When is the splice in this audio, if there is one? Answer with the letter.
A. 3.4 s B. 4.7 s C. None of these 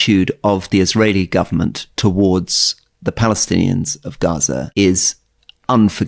B